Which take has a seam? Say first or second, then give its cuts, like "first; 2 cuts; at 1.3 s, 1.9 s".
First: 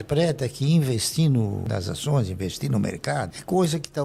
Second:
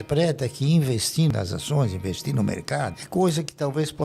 second; 1 cut; at 1.3 s